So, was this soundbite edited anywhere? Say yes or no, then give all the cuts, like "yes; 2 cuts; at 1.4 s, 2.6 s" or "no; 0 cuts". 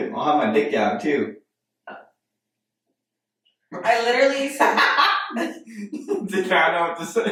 no; 0 cuts